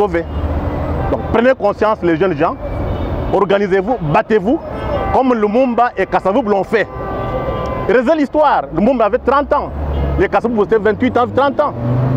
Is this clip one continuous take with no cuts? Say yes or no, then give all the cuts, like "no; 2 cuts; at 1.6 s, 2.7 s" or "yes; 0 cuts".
yes; 0 cuts